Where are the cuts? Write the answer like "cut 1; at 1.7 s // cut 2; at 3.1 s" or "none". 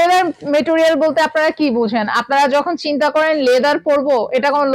none